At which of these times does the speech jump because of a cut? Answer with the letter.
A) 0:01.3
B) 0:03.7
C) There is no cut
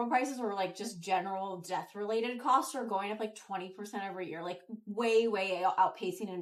C